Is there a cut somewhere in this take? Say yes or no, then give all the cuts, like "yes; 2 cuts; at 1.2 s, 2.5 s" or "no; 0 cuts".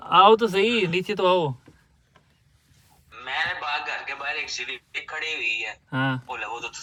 no; 0 cuts